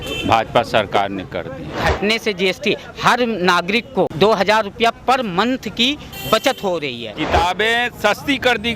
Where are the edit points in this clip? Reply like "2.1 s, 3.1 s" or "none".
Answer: 1.8 s, 4.1 s, 7.1 s